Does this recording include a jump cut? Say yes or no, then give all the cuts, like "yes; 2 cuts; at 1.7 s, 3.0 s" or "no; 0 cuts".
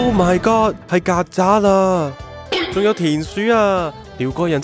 no; 0 cuts